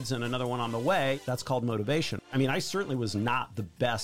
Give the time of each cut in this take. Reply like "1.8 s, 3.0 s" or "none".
1.2 s, 2.3 s